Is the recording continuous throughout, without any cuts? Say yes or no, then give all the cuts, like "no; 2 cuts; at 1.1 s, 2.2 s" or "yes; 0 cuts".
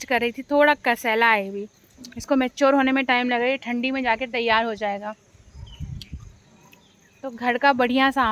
yes; 0 cuts